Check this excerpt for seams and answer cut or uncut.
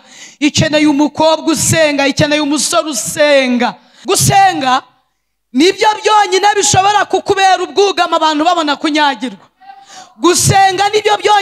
cut